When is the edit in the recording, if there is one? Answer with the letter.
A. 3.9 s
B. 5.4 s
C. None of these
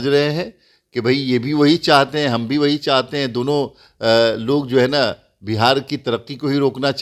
C